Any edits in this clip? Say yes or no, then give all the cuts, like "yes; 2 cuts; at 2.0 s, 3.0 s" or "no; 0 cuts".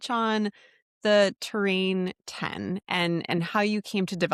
no; 0 cuts